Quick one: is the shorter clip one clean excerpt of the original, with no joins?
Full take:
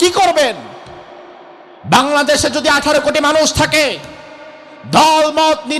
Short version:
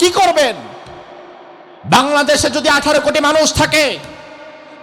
yes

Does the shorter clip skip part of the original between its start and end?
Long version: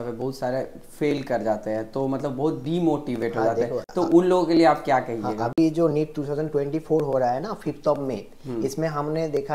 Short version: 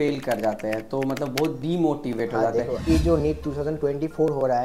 yes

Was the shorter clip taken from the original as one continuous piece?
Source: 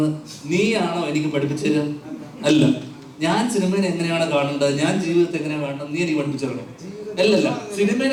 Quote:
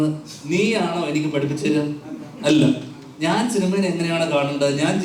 yes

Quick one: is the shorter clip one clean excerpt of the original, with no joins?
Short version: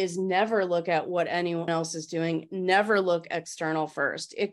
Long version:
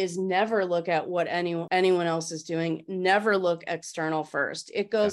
no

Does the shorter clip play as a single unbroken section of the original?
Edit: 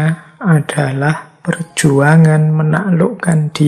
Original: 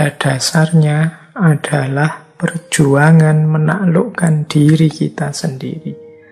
yes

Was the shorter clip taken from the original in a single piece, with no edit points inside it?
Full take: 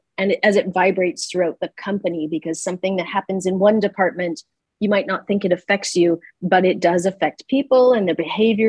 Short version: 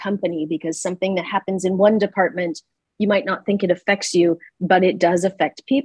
yes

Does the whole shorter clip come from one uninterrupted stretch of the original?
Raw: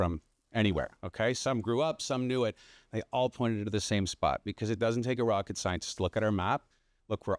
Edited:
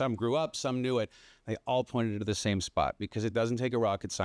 yes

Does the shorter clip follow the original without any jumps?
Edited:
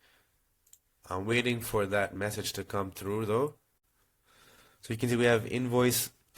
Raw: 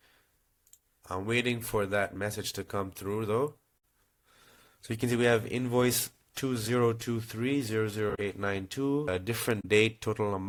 yes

